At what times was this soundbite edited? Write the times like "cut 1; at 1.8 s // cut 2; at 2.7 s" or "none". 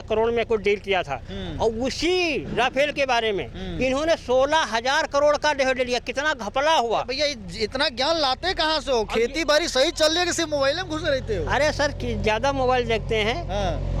none